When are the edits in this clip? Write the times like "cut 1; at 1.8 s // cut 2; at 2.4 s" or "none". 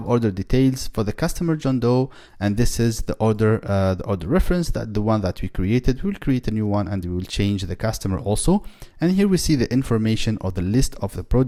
none